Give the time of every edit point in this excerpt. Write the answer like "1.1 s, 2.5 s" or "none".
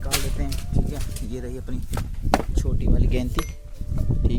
none